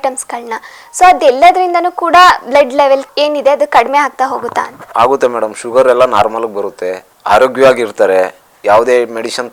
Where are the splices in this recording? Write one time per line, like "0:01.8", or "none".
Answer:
none